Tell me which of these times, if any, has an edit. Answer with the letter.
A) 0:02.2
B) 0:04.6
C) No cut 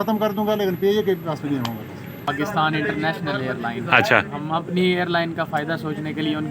A